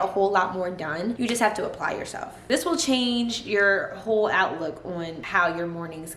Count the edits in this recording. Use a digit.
2